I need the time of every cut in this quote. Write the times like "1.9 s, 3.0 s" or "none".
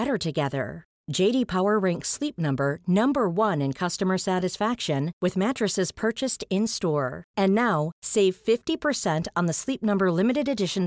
none